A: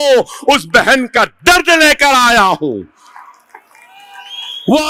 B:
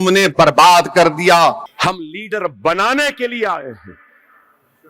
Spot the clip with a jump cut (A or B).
B